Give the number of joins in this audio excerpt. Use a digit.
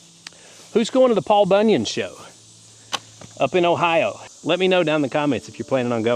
1